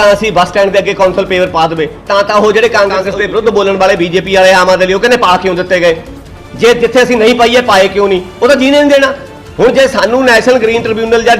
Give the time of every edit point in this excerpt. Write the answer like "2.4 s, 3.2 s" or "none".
2.0 s, 3.0 s